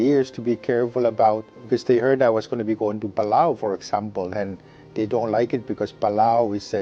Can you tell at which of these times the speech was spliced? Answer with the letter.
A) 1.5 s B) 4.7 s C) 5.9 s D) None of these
A